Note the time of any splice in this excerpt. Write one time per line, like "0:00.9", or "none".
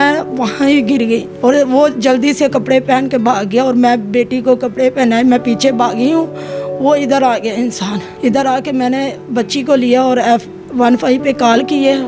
0:01.3
0:08.0